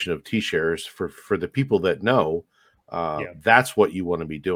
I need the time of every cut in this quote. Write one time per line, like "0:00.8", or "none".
none